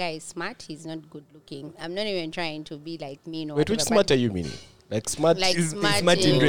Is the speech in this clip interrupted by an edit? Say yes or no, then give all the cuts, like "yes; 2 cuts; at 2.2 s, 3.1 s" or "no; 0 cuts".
yes; 1 cut; at 1.8 s